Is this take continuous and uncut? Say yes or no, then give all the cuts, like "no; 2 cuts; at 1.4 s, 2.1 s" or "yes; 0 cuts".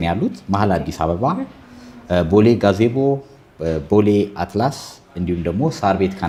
yes; 0 cuts